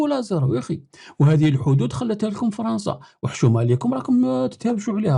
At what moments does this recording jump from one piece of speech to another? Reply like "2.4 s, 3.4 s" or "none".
none